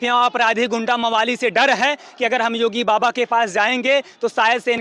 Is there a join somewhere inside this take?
no; 0 cuts

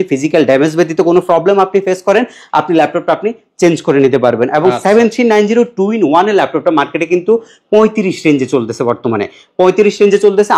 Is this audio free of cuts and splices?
yes; 0 cuts

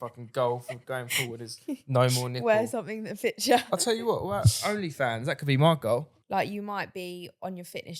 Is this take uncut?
no; 1 cut; at 6.2 s

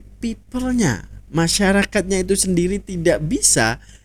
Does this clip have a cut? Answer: no; 0 cuts

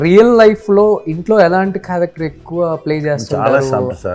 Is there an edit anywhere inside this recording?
no; 0 cuts

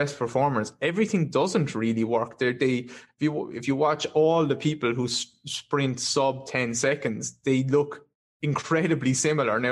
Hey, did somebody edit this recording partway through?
no; 0 cuts

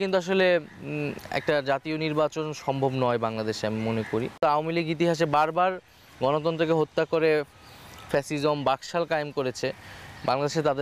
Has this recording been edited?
yes; 1 cut; at 4.2 s

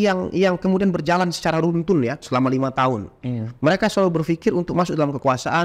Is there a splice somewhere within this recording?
no; 0 cuts

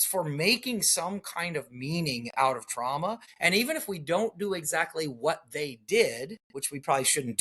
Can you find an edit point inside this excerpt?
yes; 1 cut; at 3.3 s

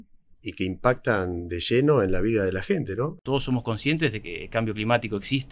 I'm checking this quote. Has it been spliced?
yes; 1 cut; at 3.2 s

